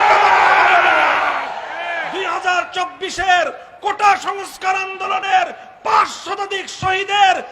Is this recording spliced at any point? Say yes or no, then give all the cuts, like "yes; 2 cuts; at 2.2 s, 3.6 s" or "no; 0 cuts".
yes; 1 cut; at 1.8 s